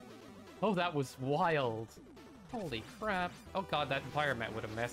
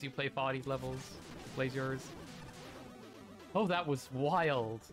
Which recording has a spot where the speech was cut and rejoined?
first; 1 cut; at 3.5 s

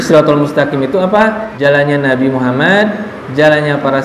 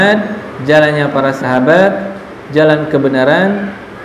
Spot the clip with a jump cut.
first; 1 cut; at 1.5 s

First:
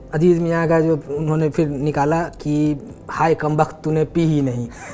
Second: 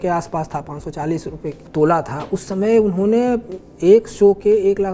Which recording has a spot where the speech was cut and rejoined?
second; 1 cut; at 1.6 s

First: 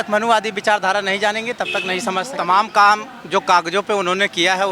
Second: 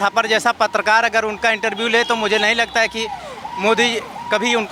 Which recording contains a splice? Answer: first; 1 cut; at 2.3 s

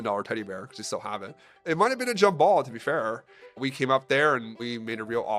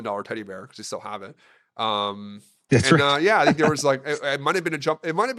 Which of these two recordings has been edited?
first; 3 cuts; at 1.6 s, 3.6 s, 4.6 s

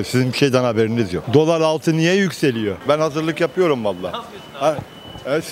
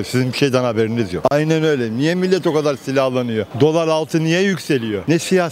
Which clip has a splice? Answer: first; 2 cuts; at 1.2 s, 2.8 s

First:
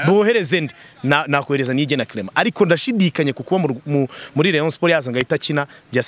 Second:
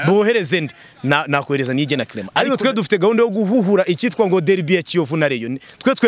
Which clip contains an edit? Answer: second; 1 cut; at 2.2 s

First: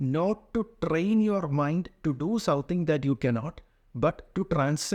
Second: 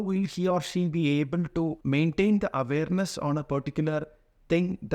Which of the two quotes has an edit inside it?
second; 1 cut; at 1.8 s

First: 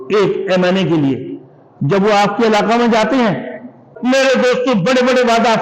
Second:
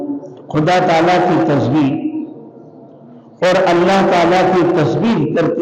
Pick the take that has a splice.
first; 1 cut; at 3.9 s

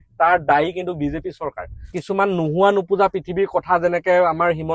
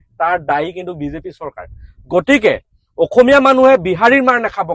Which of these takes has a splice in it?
first; 1 cut; at 2.0 s

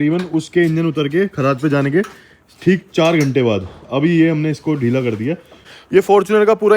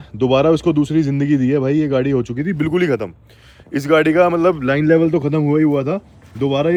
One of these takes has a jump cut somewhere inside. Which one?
first; 1 cut; at 5.7 s

